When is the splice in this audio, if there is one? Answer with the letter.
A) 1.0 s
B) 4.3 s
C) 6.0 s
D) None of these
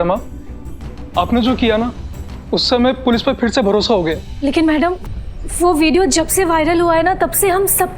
B